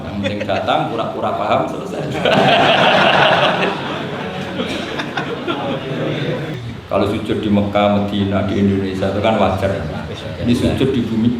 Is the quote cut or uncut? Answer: cut